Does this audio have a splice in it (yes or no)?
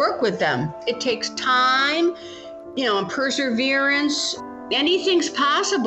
no